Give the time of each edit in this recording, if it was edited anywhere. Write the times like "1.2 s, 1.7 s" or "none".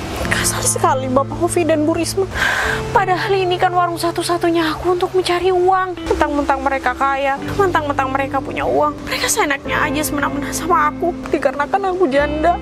2.4 s, 6.0 s, 7.5 s, 9.0 s, 11.2 s